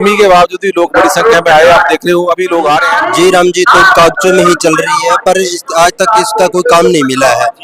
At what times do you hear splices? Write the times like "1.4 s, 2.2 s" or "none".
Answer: 2.9 s